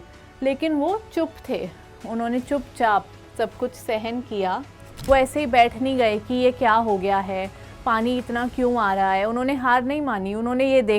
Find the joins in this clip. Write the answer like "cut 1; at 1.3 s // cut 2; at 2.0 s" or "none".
cut 1; at 4.9 s